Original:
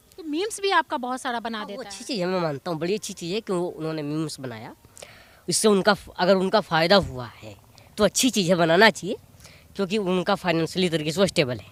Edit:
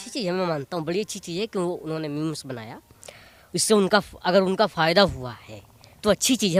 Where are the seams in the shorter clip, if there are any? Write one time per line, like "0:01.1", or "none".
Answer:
none